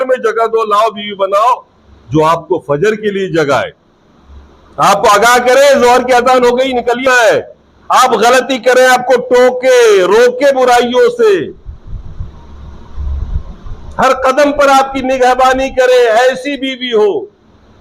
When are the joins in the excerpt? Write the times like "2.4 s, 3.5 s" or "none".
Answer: 7.0 s